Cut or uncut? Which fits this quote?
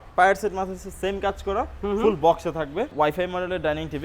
cut